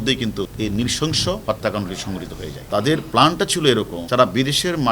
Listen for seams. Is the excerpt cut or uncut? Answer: cut